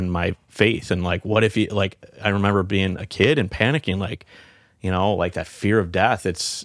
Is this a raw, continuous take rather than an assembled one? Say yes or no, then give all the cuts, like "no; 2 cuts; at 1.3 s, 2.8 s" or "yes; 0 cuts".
yes; 0 cuts